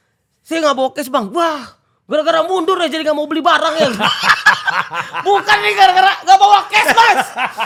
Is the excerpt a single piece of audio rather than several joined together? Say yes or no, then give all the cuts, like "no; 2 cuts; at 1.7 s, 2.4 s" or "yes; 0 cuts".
yes; 0 cuts